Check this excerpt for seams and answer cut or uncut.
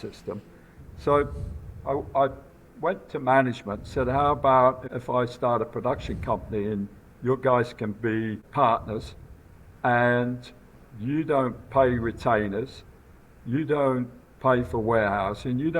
cut